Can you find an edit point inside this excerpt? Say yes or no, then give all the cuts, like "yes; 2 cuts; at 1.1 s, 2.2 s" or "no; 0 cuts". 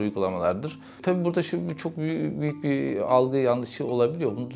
yes; 1 cut; at 1.0 s